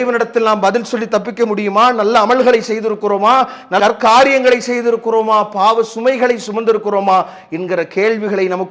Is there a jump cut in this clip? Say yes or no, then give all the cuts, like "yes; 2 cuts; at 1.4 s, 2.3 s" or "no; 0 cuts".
no; 0 cuts